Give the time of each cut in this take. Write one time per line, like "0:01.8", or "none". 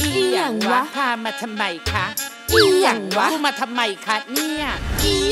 none